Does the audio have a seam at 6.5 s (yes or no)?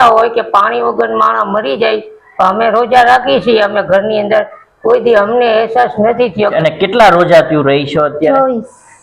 yes